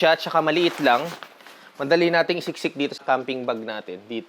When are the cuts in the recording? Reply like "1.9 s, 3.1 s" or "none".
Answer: 3.0 s